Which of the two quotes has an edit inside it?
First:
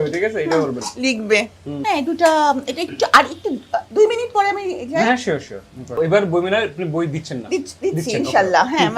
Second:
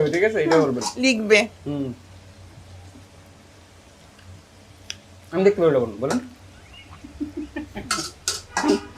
first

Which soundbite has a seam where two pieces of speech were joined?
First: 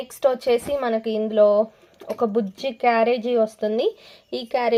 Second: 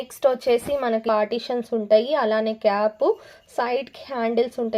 second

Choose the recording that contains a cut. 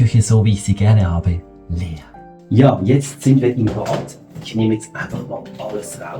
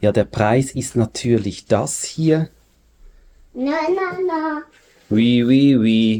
first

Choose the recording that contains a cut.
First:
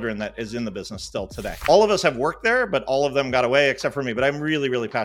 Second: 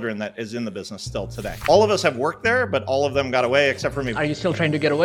second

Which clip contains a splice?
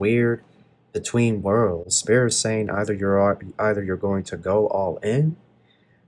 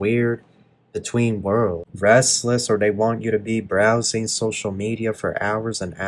second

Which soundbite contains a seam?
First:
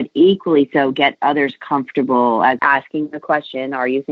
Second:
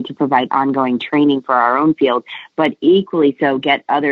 first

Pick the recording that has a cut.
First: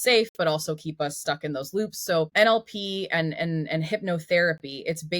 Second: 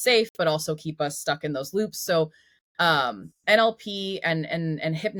first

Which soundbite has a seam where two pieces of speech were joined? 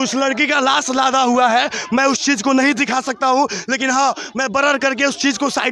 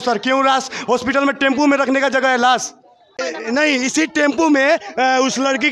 second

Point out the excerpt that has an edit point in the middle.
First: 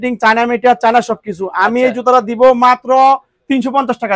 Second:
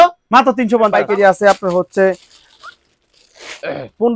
second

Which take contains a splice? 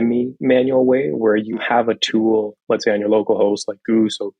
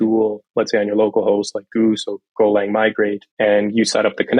second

